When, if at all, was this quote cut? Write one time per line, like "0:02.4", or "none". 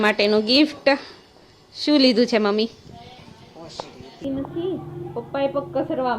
0:04.2